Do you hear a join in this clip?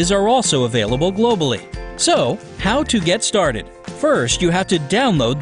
no; 0 cuts

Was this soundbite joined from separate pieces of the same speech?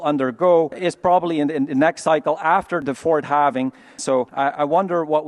yes; 1 cut; at 3.9 s

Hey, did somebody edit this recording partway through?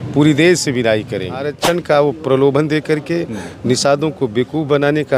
yes; 1 cut; at 1.5 s

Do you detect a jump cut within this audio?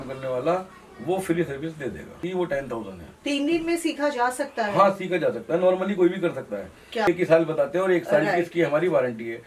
yes; 2 cuts; at 2.2 s, 7.1 s

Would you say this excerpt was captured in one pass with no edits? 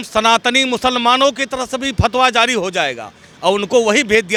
yes; 0 cuts

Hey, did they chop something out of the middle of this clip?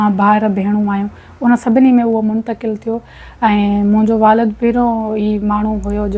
no; 0 cuts

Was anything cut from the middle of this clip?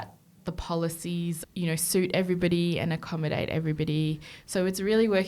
yes; 1 cut; at 1.4 s

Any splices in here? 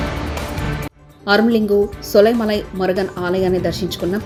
no; 0 cuts

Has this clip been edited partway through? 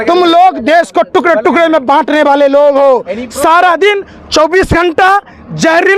no; 0 cuts

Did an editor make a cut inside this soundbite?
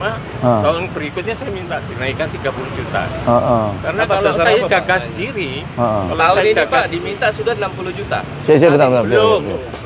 no; 0 cuts

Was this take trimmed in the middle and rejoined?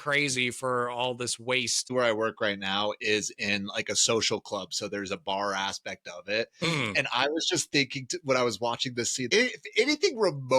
yes; 2 cuts; at 1.9 s, 9.3 s

